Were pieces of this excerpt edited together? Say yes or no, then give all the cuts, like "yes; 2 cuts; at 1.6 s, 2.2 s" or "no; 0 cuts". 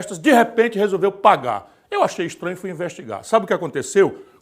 no; 0 cuts